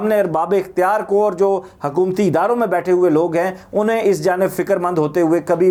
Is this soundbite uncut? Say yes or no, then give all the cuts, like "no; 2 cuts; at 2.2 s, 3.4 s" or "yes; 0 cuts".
yes; 0 cuts